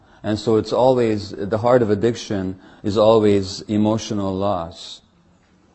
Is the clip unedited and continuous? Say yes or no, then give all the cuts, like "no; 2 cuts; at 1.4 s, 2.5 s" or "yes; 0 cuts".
no; 1 cut; at 3.2 s